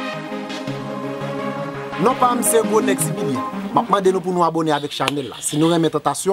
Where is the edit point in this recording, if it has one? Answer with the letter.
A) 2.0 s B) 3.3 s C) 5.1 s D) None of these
A